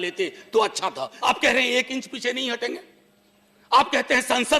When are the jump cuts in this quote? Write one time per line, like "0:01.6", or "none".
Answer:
0:01.1